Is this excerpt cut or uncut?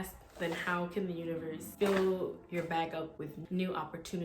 cut